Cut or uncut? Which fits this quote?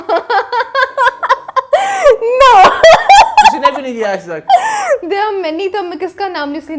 uncut